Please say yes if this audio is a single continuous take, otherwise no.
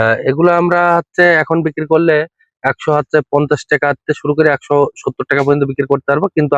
yes